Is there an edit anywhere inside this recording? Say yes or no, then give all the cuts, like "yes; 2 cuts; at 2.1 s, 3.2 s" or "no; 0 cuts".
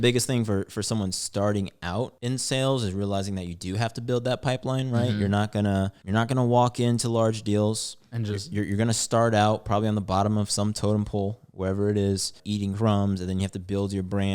yes; 3 cuts; at 2.2 s, 6.0 s, 12.4 s